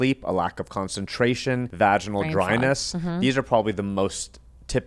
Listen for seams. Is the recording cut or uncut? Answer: cut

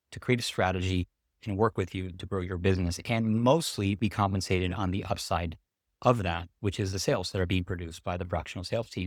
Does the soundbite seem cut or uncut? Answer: uncut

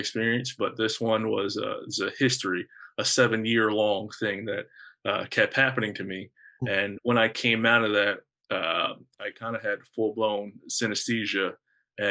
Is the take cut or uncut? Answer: uncut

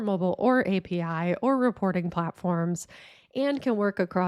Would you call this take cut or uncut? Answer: uncut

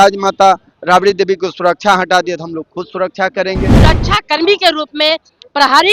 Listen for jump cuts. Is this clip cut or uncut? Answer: cut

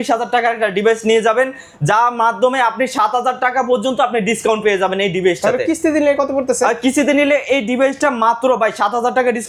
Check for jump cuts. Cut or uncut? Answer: uncut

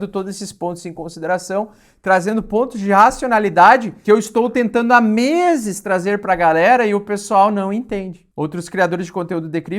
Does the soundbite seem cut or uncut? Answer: cut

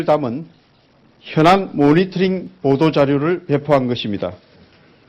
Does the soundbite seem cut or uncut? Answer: cut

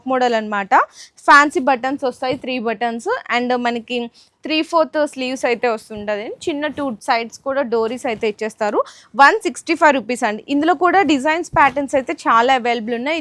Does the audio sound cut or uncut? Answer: uncut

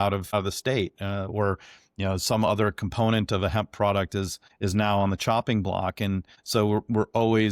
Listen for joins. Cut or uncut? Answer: cut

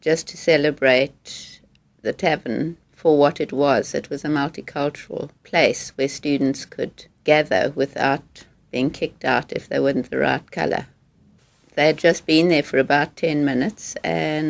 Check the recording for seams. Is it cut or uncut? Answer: cut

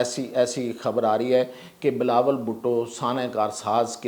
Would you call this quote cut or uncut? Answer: uncut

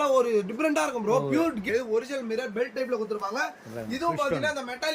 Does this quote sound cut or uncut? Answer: cut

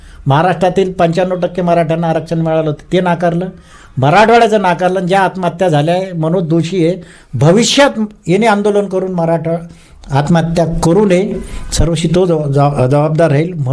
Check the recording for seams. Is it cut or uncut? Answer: uncut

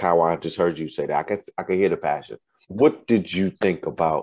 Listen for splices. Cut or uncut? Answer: cut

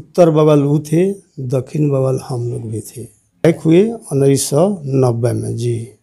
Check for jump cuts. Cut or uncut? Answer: cut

